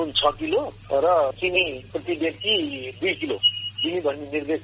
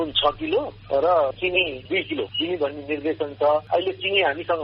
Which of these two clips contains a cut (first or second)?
second